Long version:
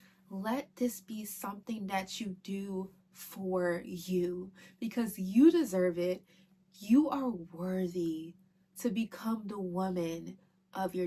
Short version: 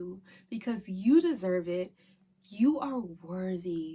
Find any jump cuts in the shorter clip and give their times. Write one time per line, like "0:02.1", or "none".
none